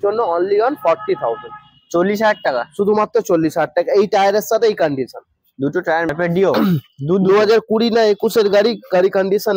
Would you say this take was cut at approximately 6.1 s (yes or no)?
yes